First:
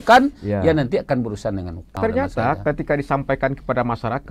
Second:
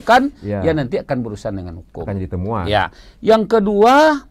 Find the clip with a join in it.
first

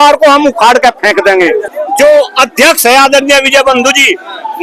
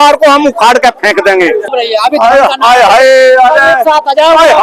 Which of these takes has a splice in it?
second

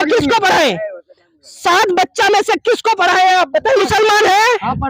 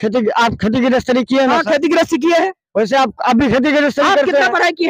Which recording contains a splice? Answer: first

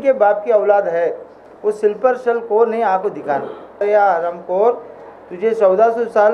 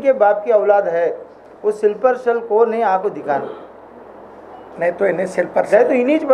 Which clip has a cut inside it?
first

